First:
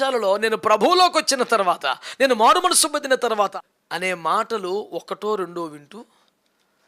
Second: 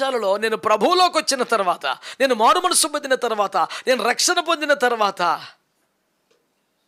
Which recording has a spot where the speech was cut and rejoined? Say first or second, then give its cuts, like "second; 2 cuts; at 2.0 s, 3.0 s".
first; 1 cut; at 3.5 s